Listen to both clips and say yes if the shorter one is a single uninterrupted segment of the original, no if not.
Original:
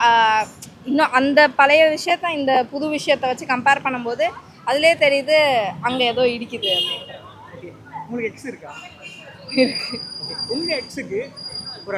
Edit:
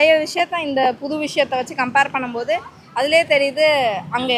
yes